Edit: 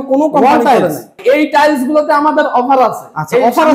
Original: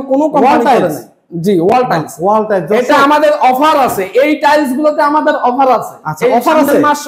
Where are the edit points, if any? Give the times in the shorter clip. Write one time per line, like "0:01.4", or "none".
0:01.1